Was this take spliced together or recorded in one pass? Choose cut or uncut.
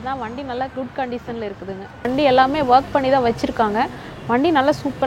cut